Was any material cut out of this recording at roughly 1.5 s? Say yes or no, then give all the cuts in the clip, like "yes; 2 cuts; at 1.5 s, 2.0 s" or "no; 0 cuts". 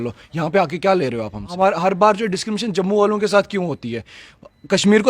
yes; 1 cut; at 1.5 s